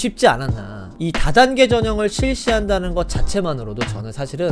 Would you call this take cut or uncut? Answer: cut